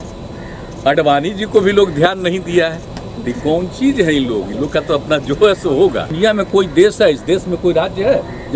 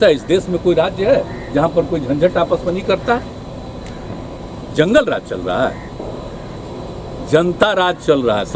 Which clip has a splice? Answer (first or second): first